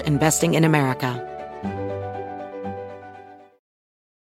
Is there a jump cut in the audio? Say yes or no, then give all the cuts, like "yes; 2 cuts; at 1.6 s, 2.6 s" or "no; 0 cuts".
yes; 1 cut; at 1.2 s